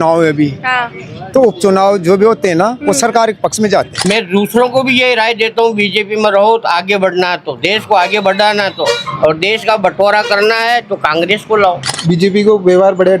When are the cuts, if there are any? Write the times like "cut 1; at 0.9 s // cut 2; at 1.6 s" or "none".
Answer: cut 1; at 4.0 s // cut 2; at 12.0 s